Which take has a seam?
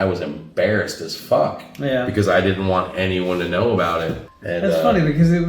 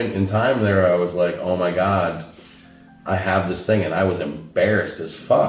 first; 1 cut; at 4.3 s

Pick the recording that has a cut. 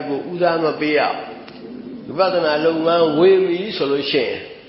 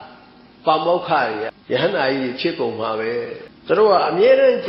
second; 2 cuts; at 1.5 s, 3.5 s

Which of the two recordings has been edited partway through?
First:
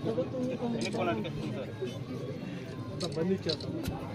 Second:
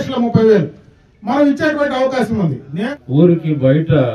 second; 1 cut; at 2.9 s

